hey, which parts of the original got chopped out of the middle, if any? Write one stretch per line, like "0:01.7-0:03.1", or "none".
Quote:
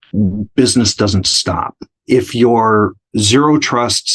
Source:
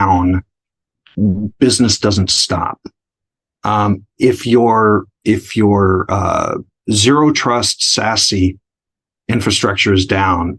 0:03.0-0:04.1
0:05.1-0:06.7